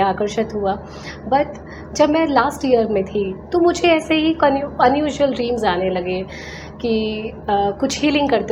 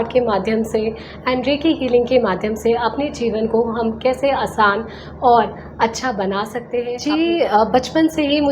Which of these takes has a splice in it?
second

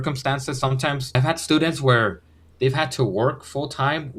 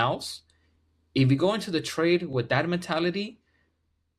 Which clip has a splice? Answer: first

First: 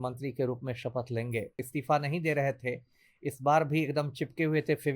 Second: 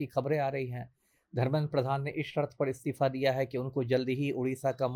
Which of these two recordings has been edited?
first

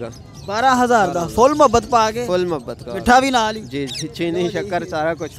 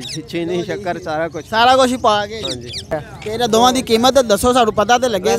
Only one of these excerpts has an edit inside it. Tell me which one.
second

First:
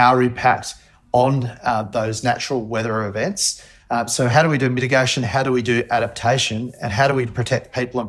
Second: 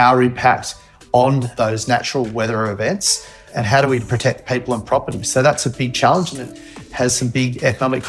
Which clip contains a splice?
second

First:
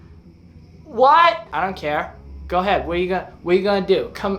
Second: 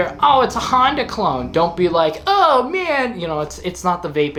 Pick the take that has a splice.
first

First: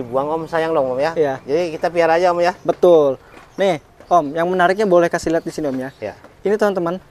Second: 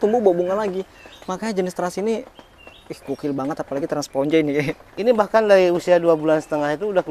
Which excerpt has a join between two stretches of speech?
second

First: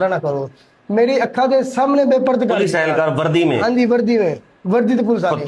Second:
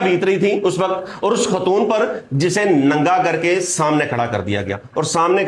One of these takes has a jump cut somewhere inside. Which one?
first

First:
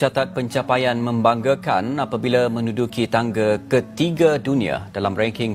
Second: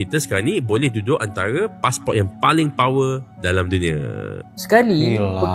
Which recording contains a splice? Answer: second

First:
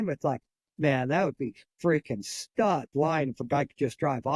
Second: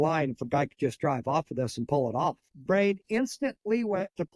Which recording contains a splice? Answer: second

